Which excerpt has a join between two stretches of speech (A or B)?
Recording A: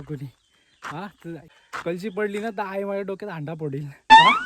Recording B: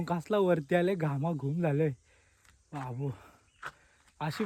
A